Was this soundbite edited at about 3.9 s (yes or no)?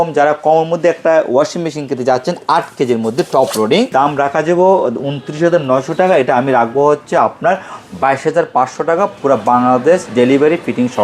yes